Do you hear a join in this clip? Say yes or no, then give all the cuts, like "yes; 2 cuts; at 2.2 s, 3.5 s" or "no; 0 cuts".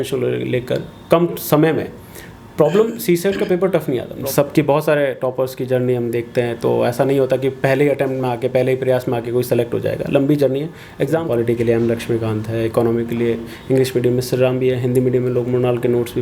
yes; 2 cuts; at 4.1 s, 11.2 s